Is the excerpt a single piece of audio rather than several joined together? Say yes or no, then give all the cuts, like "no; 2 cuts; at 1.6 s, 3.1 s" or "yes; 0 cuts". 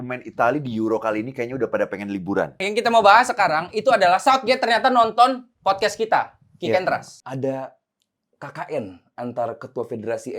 no; 2 cuts; at 2.7 s, 7.1 s